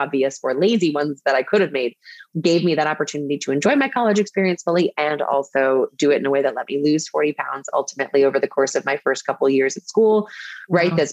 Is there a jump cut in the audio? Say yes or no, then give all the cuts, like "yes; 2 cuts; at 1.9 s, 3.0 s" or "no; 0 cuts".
yes; 1 cut; at 2.2 s